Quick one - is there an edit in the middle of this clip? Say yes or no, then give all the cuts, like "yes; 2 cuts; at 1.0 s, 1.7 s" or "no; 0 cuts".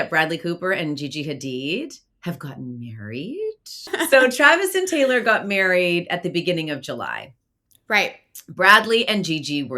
yes; 1 cut; at 3.9 s